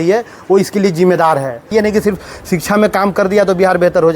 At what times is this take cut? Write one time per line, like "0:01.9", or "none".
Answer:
0:01.7